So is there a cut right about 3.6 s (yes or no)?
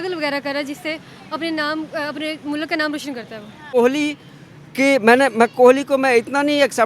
yes